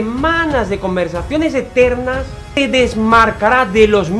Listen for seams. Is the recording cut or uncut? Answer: cut